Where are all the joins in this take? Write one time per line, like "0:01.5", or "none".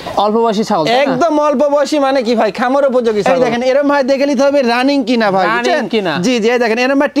0:03.2